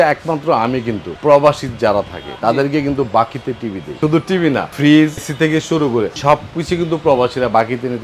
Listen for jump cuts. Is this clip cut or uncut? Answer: cut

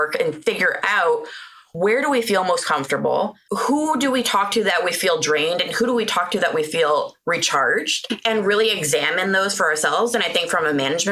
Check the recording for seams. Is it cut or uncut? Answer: cut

